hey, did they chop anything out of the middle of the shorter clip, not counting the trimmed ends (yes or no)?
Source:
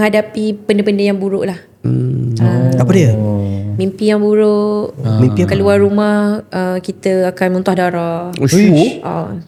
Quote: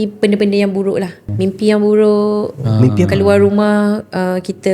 yes